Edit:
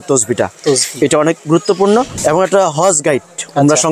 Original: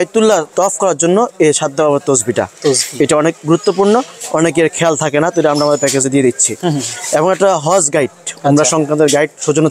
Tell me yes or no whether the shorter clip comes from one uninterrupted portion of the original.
no